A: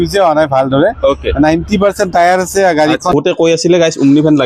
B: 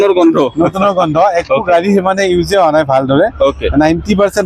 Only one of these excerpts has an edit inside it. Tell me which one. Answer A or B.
A